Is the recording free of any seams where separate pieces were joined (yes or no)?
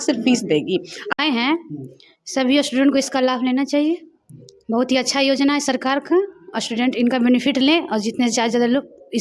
no